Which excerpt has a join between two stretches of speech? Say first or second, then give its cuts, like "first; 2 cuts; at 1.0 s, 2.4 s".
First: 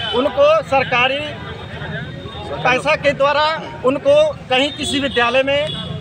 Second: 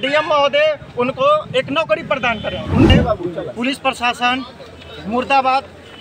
second; 1 cut; at 2.9 s